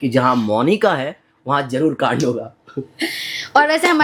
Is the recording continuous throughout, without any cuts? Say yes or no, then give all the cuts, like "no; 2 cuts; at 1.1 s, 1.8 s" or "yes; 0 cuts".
yes; 0 cuts